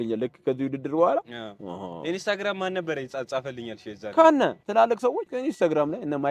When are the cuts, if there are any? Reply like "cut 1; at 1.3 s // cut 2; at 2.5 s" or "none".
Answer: cut 1; at 4.9 s